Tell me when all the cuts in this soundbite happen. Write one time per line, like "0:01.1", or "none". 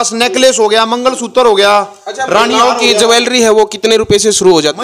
none

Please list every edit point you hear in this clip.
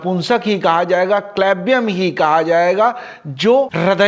none

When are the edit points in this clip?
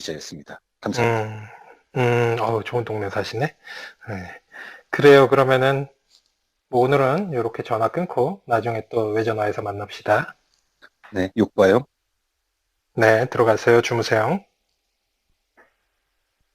0:03.6

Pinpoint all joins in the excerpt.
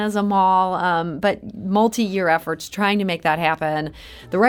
none

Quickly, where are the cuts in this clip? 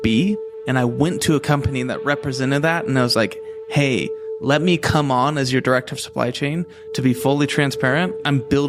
none

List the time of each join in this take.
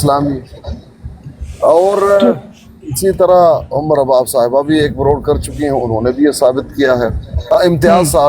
0:07.3

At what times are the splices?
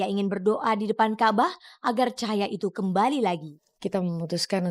0:03.5

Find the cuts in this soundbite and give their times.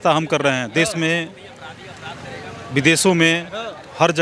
none

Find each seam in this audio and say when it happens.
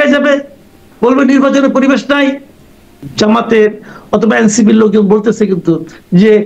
0:03.0

